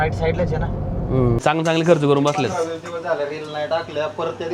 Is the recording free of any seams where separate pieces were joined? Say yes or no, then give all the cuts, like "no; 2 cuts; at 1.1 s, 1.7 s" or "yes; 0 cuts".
no; 1 cut; at 1.4 s